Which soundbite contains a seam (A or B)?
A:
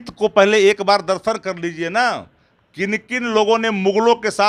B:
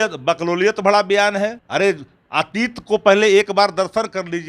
B